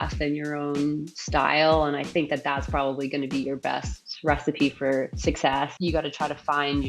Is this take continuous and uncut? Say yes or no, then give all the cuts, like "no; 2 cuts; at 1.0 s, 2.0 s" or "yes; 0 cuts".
no; 1 cut; at 5.7 s